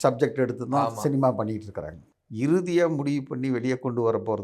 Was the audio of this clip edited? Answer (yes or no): yes